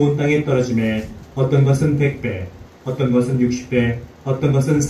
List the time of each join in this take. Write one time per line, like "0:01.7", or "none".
0:01.5